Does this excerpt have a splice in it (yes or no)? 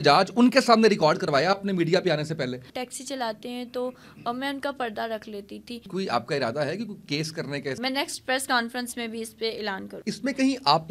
yes